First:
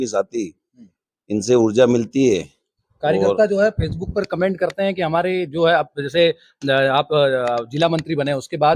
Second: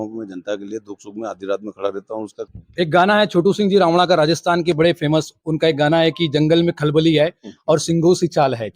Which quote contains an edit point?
second; 1 cut; at 2.4 s

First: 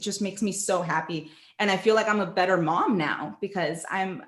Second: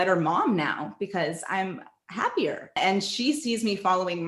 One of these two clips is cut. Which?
second; 1 cut; at 2.8 s

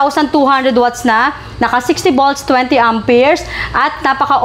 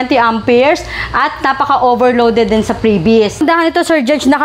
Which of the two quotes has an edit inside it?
second; 1 cut; at 3.4 s

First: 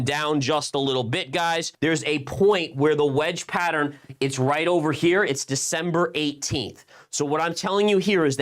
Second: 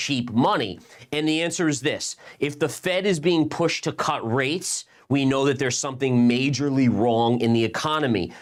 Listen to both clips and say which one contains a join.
first; 1 cut; at 1.7 s

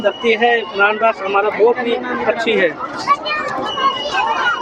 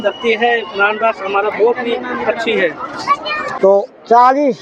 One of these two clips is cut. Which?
second; 1 cut; at 3.5 s

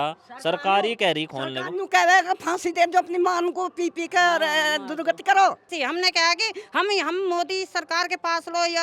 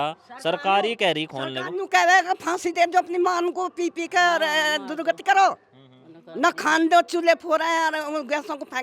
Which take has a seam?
first; 1 cut; at 5.7 s

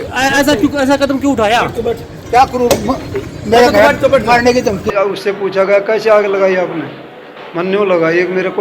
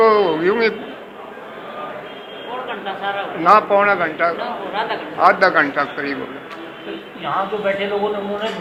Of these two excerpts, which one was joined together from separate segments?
first; 1 cut; at 4.9 s

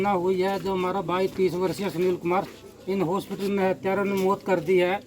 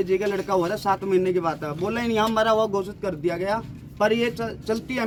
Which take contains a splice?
first; 1 cut; at 2.6 s

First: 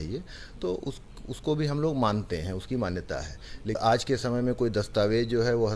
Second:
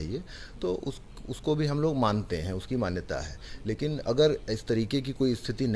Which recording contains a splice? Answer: first; 1 cut; at 3.8 s

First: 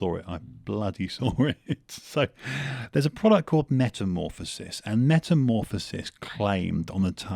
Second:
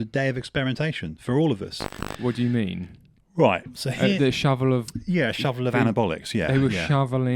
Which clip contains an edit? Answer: second; 1 cut; at 2.1 s

